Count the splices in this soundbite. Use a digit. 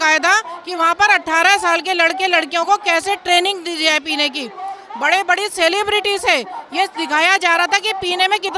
0